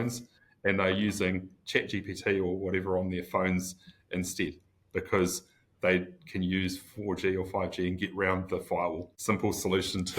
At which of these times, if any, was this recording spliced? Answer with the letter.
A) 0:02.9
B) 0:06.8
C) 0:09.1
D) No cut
C